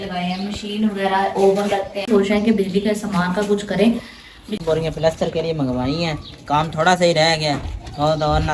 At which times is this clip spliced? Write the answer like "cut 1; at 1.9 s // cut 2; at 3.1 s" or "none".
cut 1; at 2.1 s // cut 2; at 4.4 s